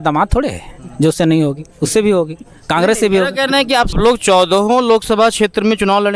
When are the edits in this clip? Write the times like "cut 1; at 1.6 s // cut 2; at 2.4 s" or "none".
cut 1; at 4.0 s